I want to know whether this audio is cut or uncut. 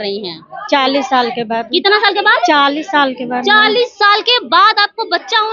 uncut